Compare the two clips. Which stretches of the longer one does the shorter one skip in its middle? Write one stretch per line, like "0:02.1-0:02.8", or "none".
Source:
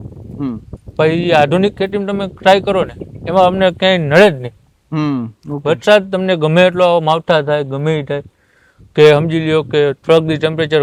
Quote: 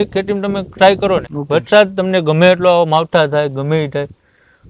0:03.0-0:05.5